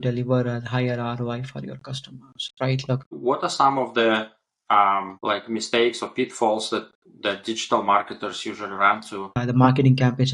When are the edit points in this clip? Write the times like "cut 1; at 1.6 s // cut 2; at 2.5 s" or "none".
cut 1; at 3.0 s // cut 2; at 5.1 s // cut 3; at 9.4 s